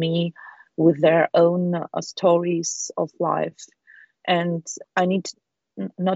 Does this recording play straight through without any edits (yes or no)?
no